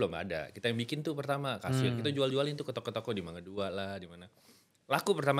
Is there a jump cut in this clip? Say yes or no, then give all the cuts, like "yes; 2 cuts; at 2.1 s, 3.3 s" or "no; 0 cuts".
no; 0 cuts